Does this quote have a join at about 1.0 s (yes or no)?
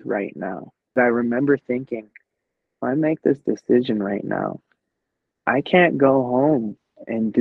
yes